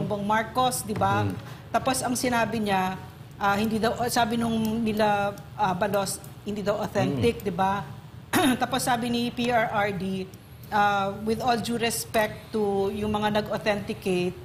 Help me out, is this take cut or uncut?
uncut